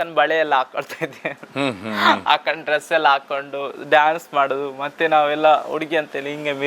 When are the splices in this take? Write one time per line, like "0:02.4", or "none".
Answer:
none